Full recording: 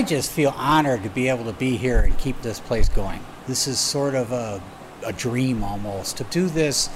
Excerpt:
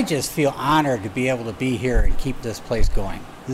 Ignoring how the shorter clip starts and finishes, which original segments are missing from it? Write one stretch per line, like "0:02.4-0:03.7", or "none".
none